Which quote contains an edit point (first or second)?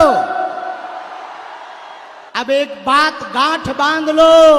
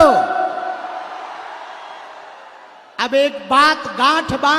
first